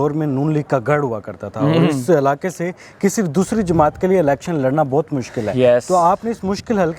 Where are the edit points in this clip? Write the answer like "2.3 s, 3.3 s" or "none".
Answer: none